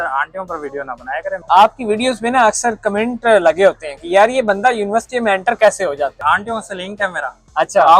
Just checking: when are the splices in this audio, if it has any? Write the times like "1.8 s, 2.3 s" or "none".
1.4 s, 6.2 s